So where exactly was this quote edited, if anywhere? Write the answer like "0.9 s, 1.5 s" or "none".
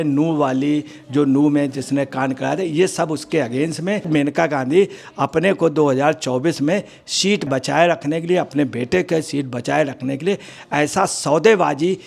4.1 s, 7.5 s